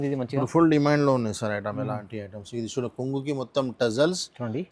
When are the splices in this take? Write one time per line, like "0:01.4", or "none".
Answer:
none